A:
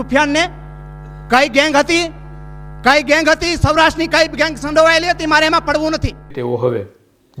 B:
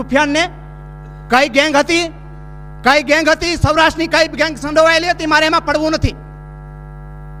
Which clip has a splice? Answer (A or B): A